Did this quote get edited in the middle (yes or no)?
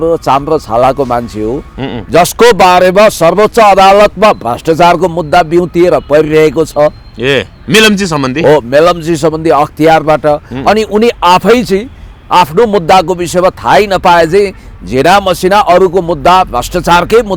yes